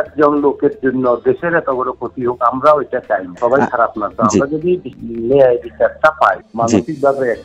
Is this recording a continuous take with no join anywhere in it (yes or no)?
no